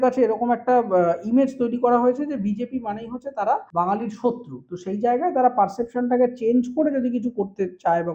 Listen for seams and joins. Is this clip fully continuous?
no; 1 cut; at 3.7 s

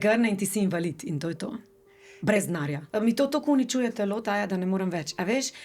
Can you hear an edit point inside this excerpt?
yes; 1 cut; at 2.8 s

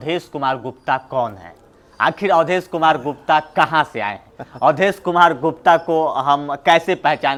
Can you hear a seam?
no; 0 cuts

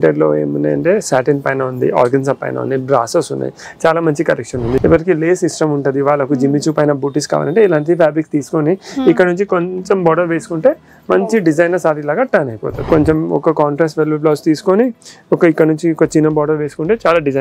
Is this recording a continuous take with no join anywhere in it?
no; 2 cuts; at 4.8 s, 12.7 s

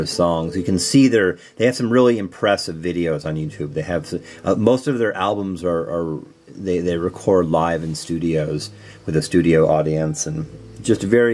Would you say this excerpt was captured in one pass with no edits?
no; 1 cut; at 1.6 s

